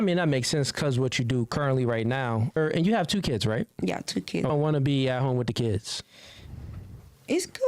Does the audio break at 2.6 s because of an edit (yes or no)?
yes